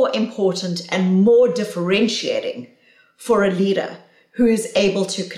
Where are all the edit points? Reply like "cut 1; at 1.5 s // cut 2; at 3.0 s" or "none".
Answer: none